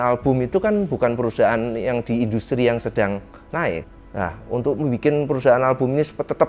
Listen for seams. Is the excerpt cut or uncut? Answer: cut